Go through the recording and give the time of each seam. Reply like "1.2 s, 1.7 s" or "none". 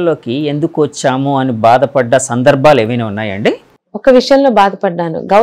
3.7 s